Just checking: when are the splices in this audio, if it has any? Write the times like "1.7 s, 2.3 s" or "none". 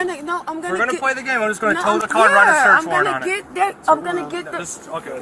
none